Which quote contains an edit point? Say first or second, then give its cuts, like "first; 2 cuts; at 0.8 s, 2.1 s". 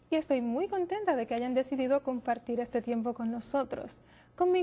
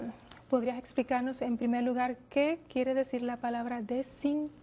first; 1 cut; at 1.3 s